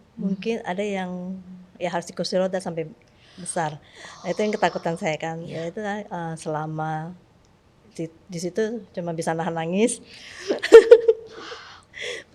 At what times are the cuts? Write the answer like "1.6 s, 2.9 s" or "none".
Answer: none